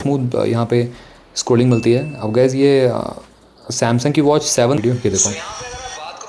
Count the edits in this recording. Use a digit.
1